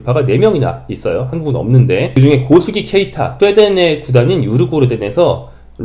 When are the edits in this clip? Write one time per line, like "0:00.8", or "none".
0:02.1
0:03.2